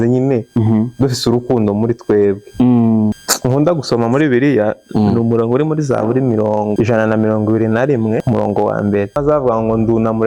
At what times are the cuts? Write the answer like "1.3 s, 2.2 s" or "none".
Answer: 3.3 s, 6.7 s, 8.2 s, 9.2 s